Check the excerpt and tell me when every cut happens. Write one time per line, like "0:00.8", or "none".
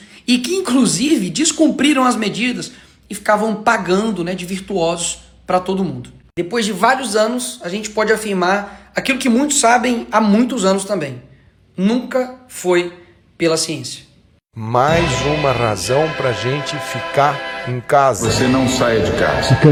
none